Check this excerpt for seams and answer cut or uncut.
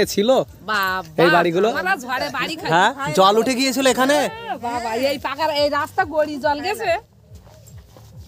uncut